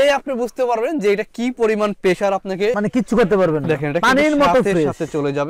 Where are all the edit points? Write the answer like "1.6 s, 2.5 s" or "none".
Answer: none

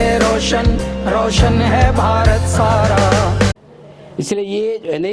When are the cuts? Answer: 3.6 s

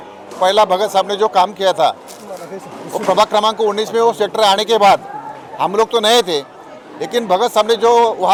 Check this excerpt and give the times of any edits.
none

